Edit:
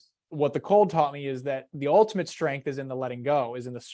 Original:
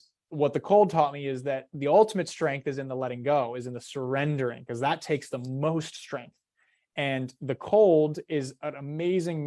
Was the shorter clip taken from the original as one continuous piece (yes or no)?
yes